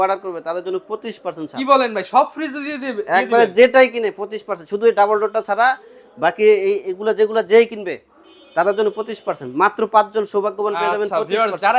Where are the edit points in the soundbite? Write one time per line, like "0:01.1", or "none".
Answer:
none